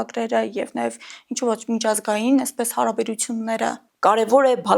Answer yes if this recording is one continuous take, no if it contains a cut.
no